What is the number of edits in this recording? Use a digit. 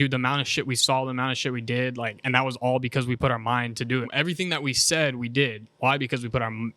1